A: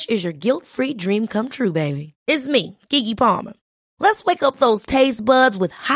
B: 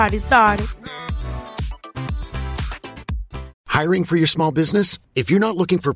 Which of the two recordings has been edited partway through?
B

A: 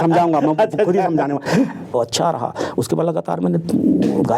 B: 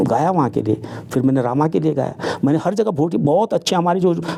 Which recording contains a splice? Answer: A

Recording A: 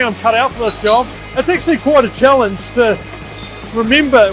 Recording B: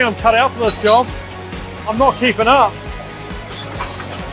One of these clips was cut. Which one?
A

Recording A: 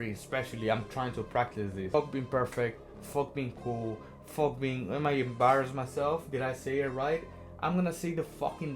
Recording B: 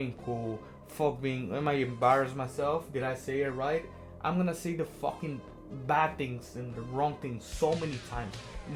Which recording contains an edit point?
A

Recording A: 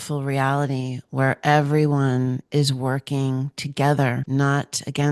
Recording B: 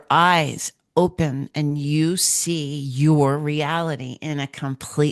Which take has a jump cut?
A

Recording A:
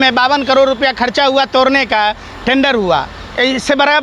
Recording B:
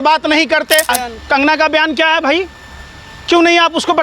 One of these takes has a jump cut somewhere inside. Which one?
B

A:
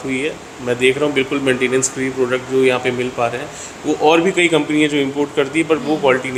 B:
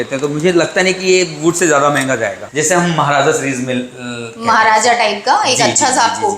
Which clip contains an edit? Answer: B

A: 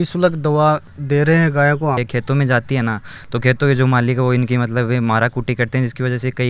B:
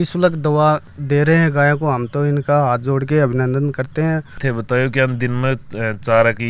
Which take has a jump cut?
A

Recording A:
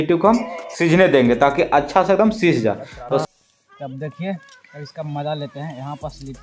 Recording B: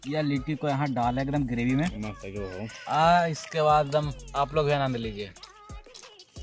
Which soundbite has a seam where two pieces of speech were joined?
A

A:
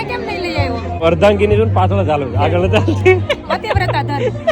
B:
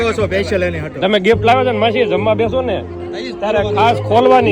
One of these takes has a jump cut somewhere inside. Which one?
A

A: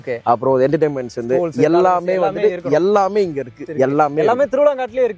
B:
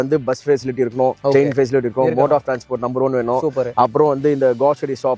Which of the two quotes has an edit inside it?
A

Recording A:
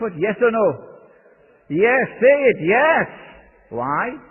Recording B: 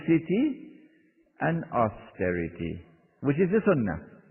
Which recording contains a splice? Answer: B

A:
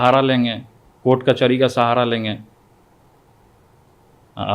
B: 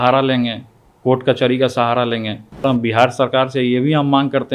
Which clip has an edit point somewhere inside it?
B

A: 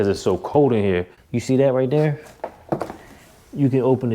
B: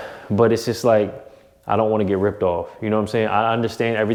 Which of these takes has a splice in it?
A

